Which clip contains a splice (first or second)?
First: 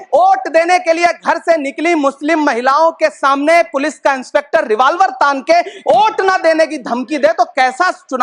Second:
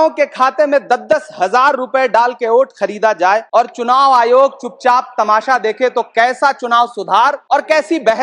second